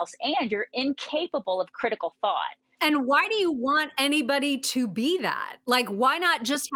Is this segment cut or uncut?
cut